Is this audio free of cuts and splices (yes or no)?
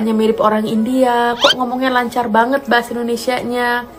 yes